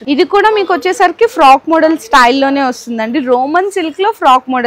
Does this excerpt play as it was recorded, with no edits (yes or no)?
yes